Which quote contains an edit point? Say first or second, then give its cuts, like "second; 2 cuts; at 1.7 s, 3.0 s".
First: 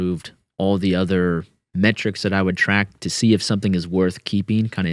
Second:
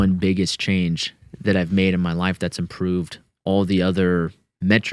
first; 1 cut; at 3.0 s